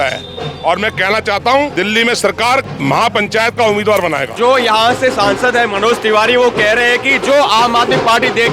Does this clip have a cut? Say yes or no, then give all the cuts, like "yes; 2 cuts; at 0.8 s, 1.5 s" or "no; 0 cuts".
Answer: yes; 1 cut; at 4.3 s